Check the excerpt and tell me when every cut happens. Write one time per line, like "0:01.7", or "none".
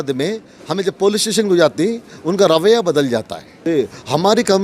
0:03.6